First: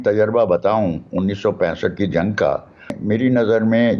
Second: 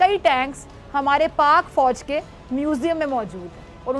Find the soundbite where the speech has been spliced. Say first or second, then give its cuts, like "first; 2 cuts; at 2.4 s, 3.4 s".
first; 1 cut; at 3.0 s